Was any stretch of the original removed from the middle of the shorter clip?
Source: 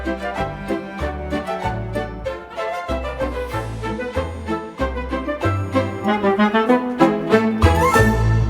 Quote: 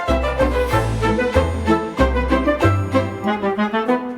no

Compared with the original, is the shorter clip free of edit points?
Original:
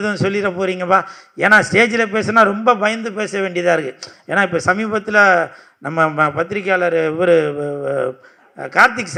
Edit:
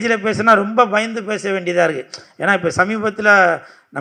yes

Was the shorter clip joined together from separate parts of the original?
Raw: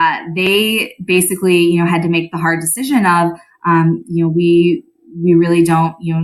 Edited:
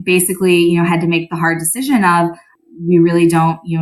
yes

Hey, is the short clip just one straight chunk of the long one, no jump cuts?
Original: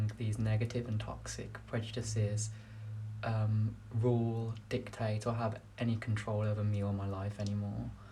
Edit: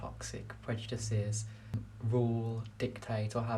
no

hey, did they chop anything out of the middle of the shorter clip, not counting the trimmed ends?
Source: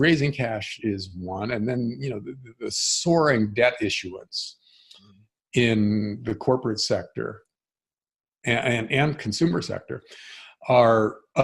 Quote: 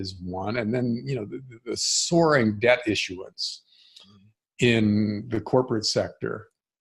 no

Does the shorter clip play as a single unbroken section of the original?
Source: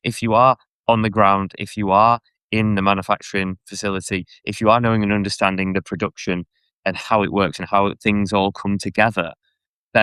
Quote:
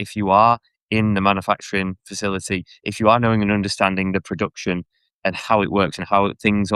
yes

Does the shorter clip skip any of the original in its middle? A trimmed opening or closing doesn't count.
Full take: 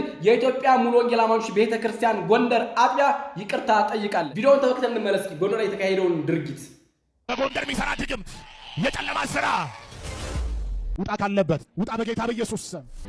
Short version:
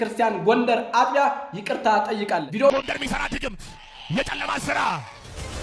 yes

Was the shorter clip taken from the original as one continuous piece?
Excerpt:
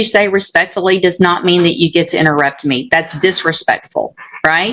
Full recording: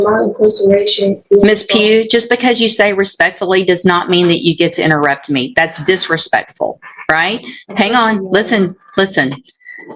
yes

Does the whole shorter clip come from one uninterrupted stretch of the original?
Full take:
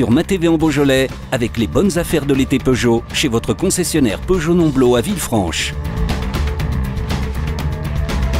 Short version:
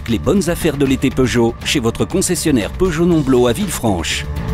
yes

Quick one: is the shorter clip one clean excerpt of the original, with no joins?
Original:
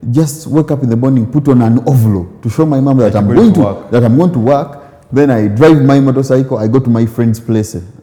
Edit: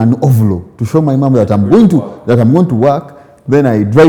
yes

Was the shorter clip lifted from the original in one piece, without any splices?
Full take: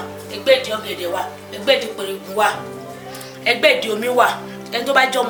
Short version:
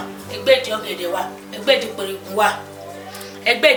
yes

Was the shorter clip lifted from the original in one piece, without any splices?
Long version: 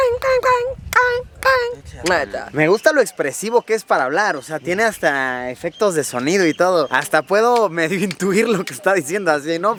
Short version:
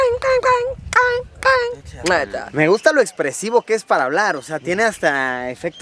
yes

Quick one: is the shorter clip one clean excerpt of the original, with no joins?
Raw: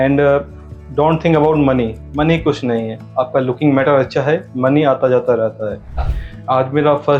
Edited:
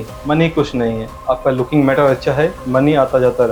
yes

